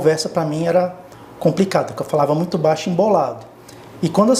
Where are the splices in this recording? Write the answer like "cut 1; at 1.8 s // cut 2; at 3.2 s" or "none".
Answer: none